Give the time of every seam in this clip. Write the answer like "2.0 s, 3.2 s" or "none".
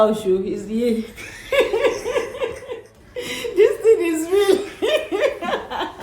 2.8 s